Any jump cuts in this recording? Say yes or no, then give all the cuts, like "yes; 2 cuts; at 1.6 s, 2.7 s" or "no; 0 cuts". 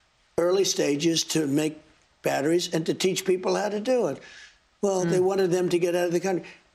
no; 0 cuts